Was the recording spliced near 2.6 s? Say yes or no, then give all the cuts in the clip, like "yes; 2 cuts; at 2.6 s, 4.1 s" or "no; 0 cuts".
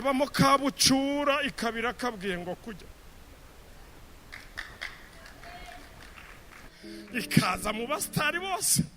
no; 1 cut; at 6.6 s